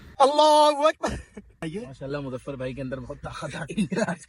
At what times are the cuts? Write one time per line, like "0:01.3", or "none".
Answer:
0:01.6